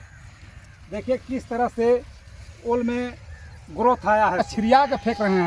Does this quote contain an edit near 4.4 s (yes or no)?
yes